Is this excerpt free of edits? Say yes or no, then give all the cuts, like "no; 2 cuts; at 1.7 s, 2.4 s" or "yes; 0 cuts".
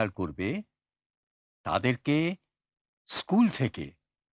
yes; 0 cuts